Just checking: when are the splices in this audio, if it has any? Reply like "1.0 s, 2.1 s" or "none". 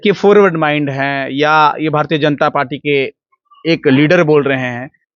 none